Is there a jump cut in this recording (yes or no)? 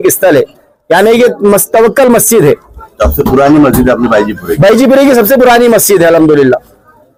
no